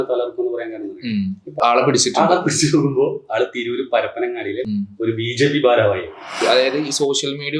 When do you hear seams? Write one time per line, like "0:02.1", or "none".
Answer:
0:01.6
0:04.6
0:06.4